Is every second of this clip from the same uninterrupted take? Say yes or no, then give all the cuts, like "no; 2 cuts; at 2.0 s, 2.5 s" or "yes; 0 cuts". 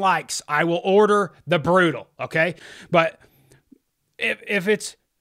no; 1 cut; at 2.6 s